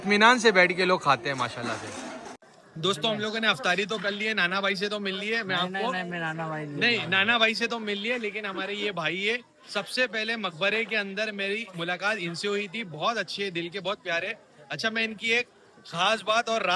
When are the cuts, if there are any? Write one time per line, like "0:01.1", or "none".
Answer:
none